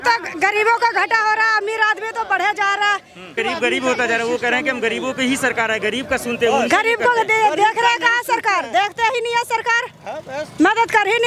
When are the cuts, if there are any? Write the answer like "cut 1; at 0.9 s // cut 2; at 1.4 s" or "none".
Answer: none